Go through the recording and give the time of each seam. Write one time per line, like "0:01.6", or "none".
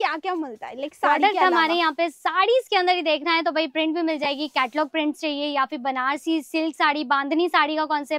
none